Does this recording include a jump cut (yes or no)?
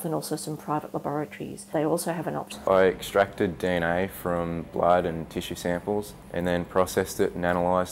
no